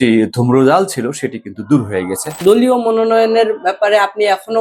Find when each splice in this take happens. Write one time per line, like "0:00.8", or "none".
0:02.4